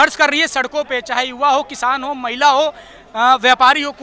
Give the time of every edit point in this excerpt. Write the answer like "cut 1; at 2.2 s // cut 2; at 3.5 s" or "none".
none